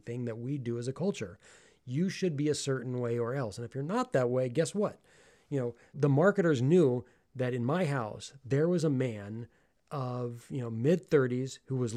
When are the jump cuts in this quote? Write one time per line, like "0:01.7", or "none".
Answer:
0:05.9